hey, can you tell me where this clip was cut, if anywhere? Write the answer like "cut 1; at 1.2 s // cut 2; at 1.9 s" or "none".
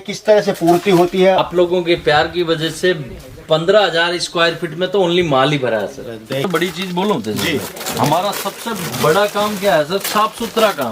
cut 1; at 1.4 s // cut 2; at 6.5 s